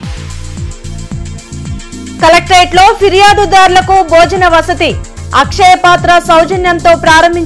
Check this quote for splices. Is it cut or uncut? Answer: cut